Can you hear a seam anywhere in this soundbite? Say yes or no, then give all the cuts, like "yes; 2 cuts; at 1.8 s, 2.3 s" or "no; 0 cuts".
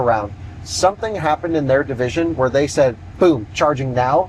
no; 0 cuts